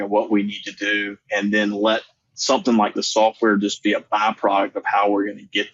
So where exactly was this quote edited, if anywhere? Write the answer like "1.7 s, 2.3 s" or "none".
none